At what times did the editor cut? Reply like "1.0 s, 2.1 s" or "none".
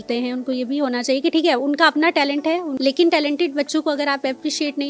2.7 s